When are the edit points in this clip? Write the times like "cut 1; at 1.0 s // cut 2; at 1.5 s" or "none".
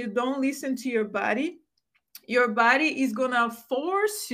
none